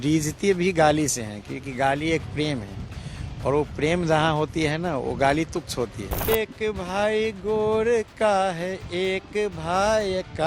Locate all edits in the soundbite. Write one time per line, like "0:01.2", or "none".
0:06.3